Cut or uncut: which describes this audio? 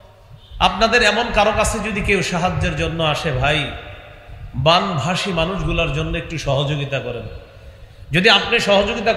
uncut